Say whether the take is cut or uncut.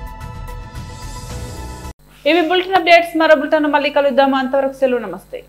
uncut